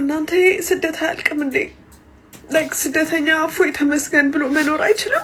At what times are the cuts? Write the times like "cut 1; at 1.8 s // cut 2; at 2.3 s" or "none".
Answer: none

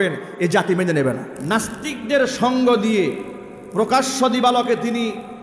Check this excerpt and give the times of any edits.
cut 1; at 1.3 s

